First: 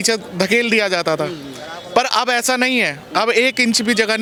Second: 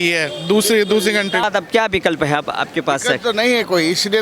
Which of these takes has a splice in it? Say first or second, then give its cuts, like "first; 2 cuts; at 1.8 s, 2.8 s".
second; 1 cut; at 1.4 s